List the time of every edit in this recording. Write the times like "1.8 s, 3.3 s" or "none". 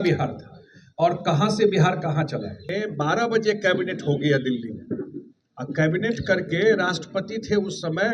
2.7 s

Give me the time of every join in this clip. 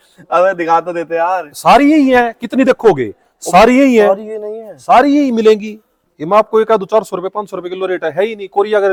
none

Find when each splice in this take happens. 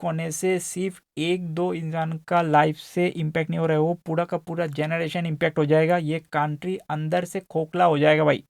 none

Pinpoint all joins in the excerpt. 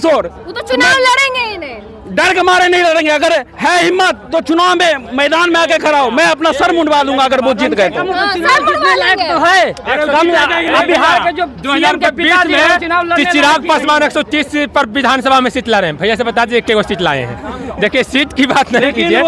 none

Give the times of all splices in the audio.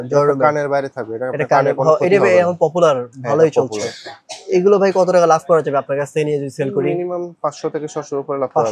none

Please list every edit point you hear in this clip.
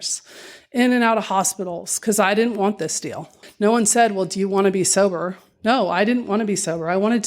3.4 s

